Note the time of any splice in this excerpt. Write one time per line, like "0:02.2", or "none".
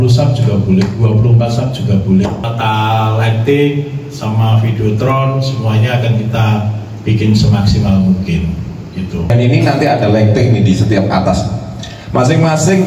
0:02.5
0:09.3